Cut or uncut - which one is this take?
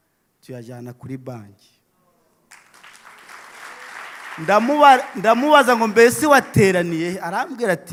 uncut